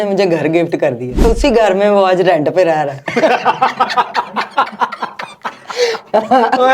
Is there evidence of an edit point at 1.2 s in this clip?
yes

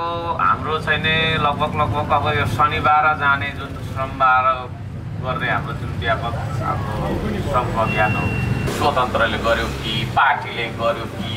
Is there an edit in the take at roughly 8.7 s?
yes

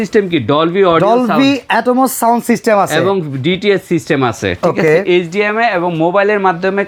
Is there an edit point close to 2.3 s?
no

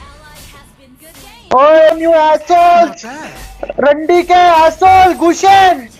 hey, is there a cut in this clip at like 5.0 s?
no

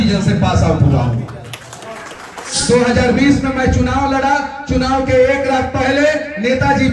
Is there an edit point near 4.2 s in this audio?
no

